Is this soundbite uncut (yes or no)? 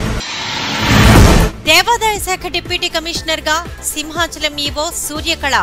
no